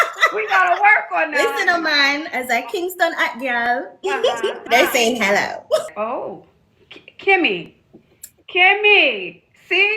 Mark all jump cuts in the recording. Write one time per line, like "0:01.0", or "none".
0:04.6
0:05.8